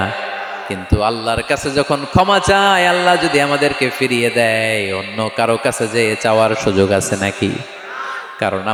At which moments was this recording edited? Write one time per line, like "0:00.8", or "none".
none

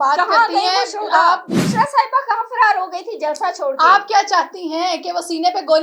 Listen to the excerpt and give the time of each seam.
0:01.6

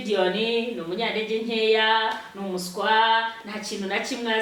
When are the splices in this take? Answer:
none

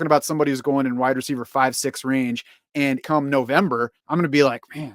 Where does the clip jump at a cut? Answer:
0:03.0
0:04.0

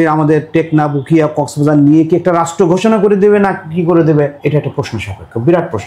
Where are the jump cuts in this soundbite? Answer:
0:04.4

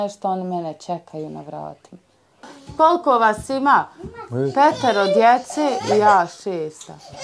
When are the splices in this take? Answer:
0:02.5

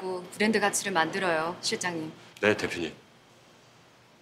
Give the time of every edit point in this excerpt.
0:02.2
0:03.3

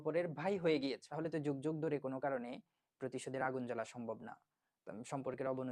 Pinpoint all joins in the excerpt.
0:01.1

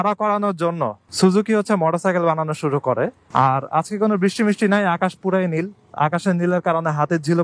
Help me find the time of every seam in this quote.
0:03.2

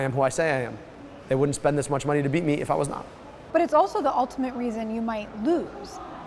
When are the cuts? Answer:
none

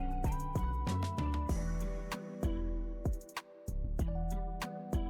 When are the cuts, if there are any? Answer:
0:00.8
0:03.0

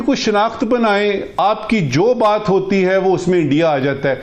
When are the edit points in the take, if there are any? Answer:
none

